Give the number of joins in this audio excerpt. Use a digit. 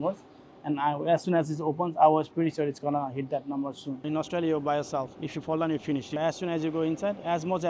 2